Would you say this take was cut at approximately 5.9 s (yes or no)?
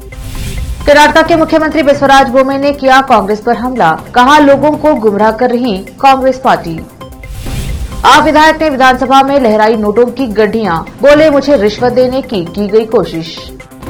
no